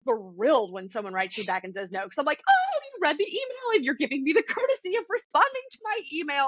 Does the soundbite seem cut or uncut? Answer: uncut